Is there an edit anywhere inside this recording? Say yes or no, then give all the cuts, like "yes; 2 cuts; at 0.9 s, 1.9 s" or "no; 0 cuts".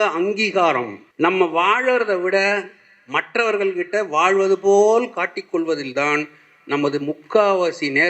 yes; 1 cut; at 1.0 s